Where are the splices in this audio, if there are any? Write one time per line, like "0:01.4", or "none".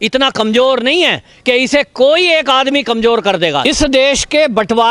0:03.6